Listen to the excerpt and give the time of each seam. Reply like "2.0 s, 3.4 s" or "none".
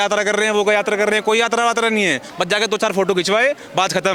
none